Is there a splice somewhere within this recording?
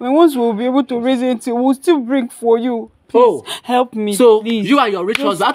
no; 0 cuts

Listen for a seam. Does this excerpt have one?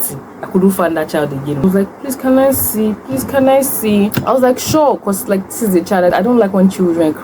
yes; 3 cuts; at 1.6 s, 4.2 s, 6.1 s

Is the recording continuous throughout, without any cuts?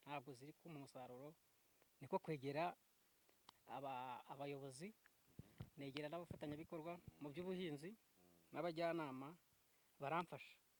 yes; 0 cuts

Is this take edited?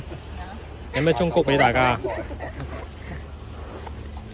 no; 0 cuts

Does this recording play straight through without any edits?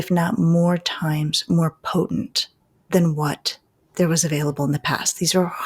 yes; 0 cuts

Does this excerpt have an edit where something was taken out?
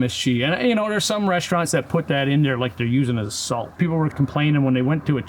yes; 1 cut; at 4.0 s

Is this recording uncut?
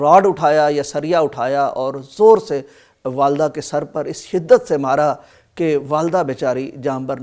yes; 0 cuts

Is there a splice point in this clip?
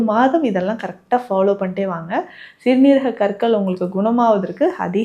no; 0 cuts

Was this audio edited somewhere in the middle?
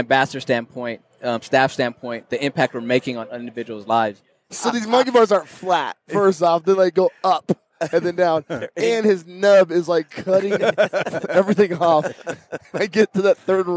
yes; 1 cut; at 4.5 s

